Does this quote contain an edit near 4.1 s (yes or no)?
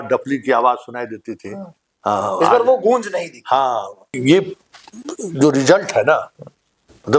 yes